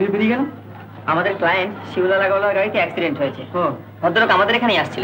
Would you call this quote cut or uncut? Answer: uncut